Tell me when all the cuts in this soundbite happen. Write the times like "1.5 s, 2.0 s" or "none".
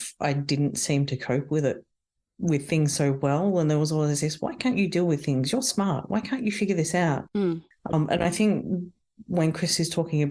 none